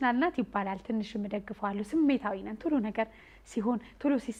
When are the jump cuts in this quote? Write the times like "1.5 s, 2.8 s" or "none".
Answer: none